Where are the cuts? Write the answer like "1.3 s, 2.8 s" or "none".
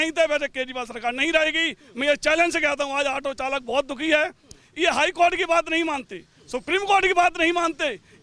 none